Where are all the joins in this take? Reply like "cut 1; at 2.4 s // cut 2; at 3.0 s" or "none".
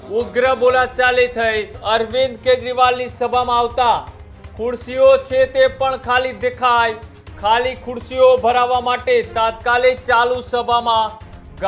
cut 1; at 1.8 s